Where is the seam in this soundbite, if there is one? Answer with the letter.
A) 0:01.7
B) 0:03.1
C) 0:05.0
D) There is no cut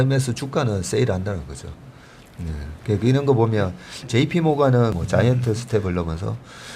C